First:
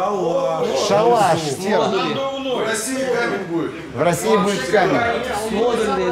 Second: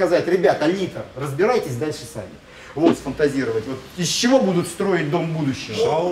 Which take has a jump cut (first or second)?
second